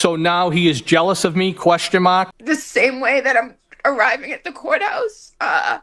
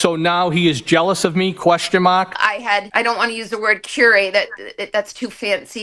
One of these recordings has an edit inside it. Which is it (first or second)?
first